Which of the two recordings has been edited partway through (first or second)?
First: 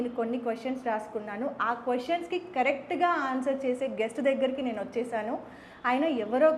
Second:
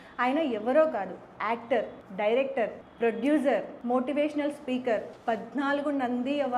second